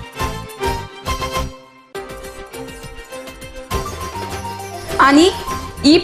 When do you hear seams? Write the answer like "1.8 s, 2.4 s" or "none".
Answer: 4.8 s